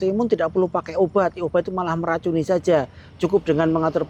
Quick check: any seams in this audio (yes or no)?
no